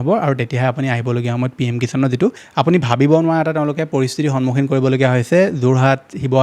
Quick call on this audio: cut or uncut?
cut